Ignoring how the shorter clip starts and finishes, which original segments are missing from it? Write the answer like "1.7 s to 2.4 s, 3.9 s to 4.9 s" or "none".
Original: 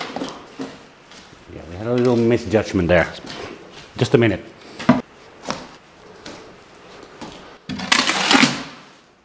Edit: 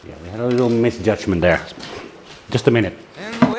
none

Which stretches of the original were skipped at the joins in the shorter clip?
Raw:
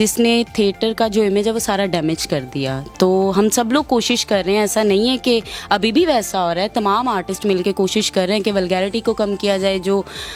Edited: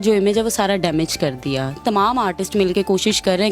2.9 s to 6.7 s

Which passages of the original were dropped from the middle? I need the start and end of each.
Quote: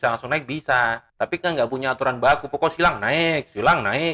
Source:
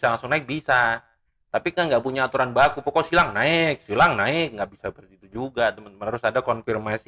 1.1 s to 1.4 s

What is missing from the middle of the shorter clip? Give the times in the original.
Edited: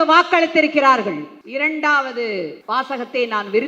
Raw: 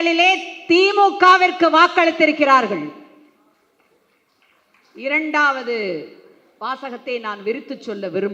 3.0 s to 4.9 s, 6.1 s to 6.5 s

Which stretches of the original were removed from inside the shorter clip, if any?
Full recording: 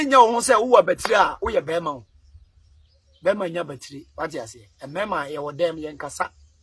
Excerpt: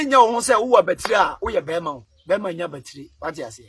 2.1 s to 3.1 s

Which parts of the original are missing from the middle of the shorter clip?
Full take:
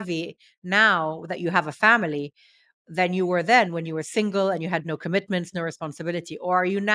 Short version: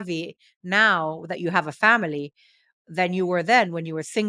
none

